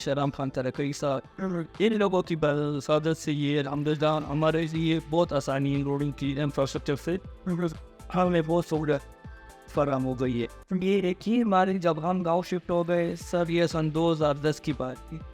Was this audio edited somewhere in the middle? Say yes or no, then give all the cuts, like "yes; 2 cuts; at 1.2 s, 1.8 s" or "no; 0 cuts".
yes; 1 cut; at 10.8 s